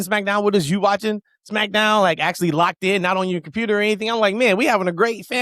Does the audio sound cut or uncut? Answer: uncut